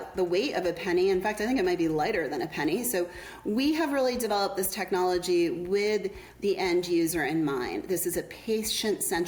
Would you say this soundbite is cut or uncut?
uncut